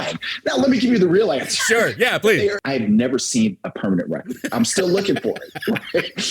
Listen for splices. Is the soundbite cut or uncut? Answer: cut